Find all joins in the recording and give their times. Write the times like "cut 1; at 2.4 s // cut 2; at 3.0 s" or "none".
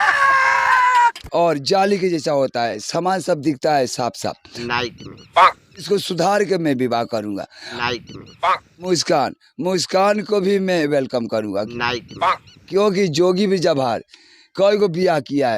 cut 1; at 1.2 s